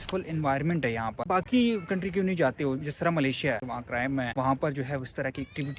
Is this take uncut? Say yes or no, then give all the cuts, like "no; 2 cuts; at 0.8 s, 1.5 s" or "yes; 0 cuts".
no; 2 cuts; at 1.2 s, 3.6 s